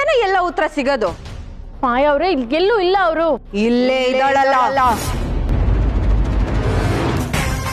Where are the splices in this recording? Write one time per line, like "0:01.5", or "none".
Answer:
none